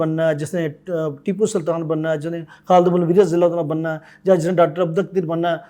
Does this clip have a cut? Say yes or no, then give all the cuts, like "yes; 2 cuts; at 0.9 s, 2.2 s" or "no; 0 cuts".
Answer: no; 0 cuts